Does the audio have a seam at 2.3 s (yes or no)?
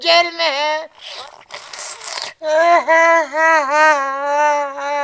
no